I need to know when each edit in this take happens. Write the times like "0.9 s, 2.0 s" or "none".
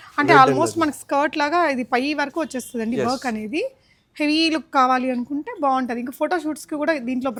none